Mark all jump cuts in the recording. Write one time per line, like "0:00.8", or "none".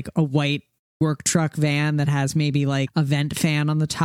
0:02.9